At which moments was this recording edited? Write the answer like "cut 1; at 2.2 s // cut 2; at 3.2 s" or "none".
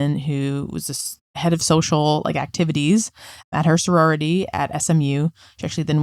cut 1; at 3.5 s

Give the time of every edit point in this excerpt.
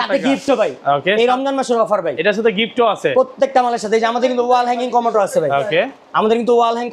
none

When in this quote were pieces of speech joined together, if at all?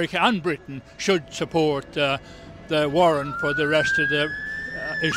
none

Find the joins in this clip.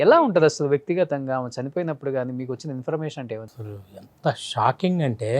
cut 1; at 3.5 s

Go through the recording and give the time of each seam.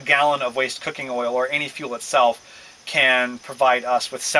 none

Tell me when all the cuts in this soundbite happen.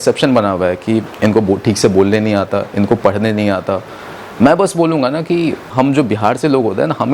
cut 1; at 5.7 s

